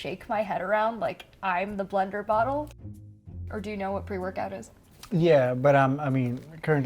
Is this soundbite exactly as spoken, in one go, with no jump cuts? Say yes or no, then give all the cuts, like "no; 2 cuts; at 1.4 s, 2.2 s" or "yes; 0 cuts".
no; 1 cut; at 3.0 s